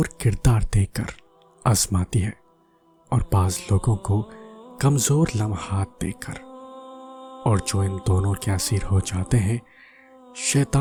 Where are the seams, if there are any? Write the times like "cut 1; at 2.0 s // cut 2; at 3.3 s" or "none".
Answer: none